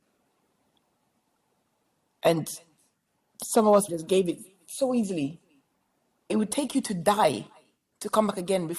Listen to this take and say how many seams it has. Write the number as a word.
two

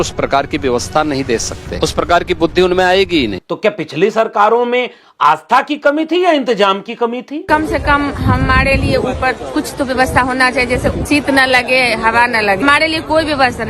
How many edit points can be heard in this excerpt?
five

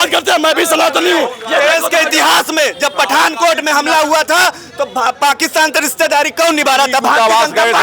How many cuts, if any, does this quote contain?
zero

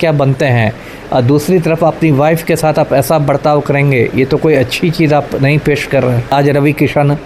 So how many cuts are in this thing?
one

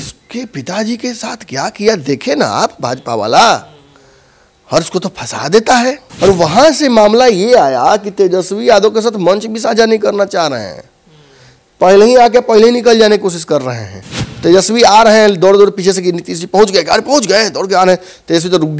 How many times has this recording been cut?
one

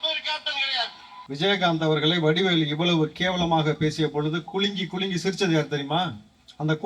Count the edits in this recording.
one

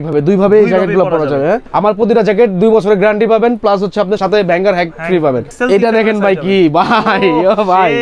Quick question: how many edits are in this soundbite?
three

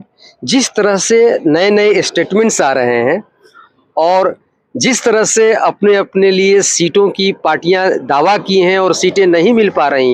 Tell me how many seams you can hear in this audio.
zero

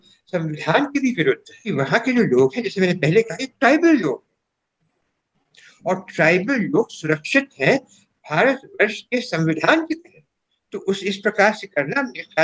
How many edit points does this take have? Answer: zero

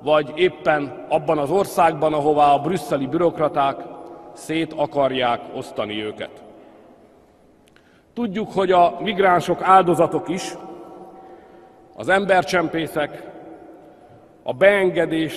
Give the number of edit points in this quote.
one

